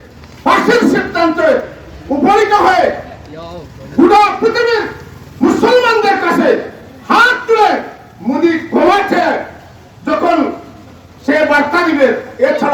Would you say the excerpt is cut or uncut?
uncut